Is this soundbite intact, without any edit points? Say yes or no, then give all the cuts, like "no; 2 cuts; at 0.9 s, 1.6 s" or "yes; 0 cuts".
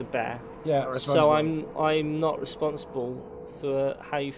no; 1 cut; at 0.9 s